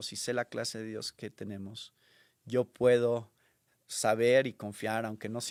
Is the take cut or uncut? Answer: uncut